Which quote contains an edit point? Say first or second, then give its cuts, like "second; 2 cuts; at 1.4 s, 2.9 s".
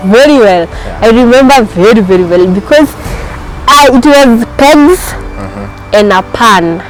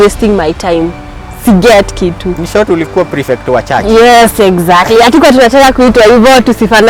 second; 1 cut; at 2.3 s